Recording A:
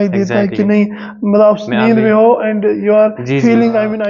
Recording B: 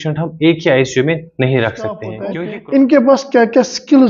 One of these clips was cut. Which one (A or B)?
B